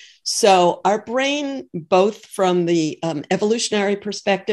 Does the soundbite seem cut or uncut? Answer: uncut